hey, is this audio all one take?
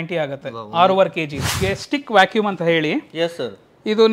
no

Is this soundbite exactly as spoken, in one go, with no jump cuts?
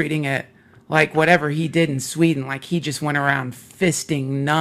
yes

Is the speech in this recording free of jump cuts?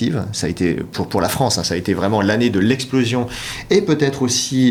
yes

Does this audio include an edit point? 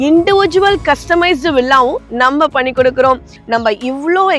yes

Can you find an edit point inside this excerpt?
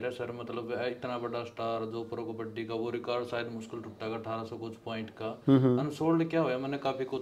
no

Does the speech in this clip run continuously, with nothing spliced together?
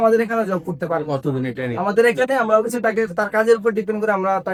yes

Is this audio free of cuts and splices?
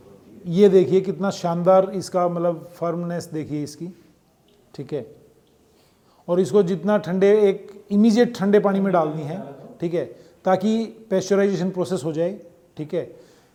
yes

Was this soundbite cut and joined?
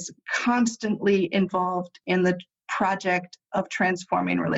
no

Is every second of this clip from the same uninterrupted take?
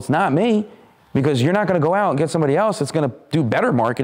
yes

